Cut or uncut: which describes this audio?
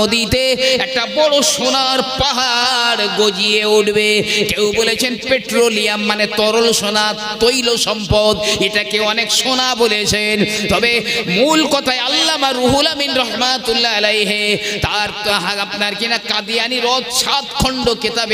uncut